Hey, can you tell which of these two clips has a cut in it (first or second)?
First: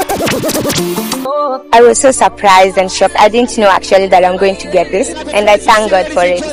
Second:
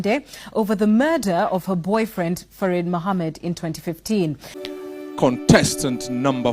second